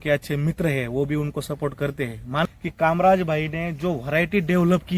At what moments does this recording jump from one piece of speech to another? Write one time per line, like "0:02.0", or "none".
0:02.5

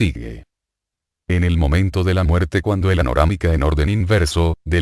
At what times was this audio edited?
none

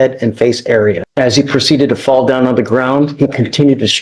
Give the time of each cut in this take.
0:01.1

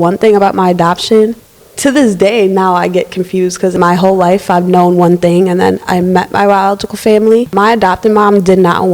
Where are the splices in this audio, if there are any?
0:01.4
0:03.7
0:07.5

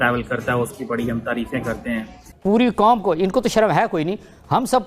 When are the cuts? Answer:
0:02.2

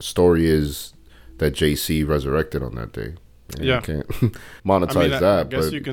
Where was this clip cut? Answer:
0:04.5

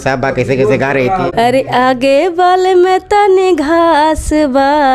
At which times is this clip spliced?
0:01.3

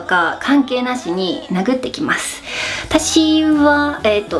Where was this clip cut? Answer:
none

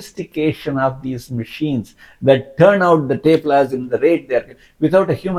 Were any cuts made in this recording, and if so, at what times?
none

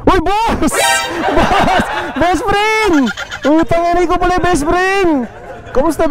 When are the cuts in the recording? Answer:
none

